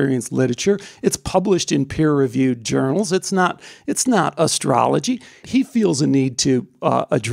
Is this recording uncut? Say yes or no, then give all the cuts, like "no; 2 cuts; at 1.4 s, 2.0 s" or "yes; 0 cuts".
no; 1 cut; at 5.4 s